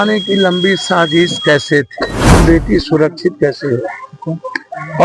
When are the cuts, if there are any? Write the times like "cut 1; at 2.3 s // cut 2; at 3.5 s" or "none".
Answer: cut 1; at 2.3 s